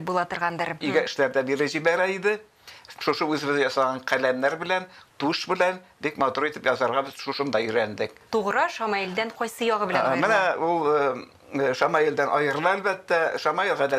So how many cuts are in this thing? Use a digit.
2